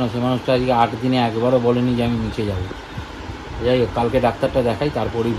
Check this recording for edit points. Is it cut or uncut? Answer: uncut